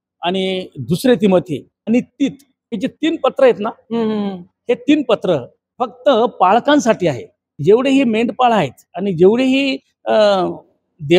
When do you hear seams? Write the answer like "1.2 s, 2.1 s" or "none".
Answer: 1.7 s, 2.8 s, 5.6 s, 7.6 s